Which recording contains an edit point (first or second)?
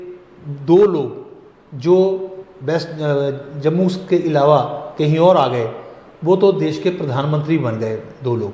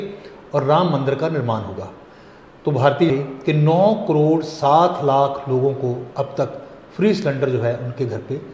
second